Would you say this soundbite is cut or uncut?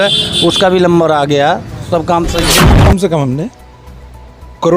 cut